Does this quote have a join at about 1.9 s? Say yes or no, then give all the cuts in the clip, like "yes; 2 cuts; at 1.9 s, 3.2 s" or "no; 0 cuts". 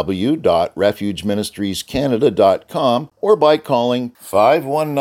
no; 1 cut; at 3.1 s